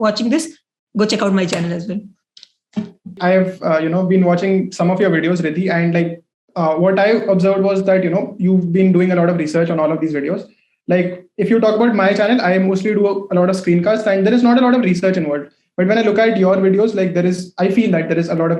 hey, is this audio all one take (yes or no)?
no